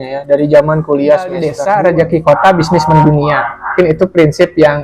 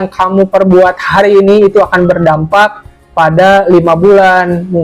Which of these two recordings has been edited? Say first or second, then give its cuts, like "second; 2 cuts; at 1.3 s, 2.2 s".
first; 1 cut; at 1.5 s